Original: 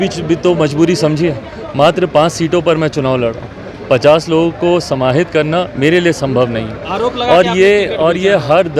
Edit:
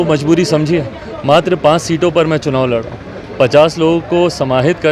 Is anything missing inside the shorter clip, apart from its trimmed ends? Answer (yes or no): no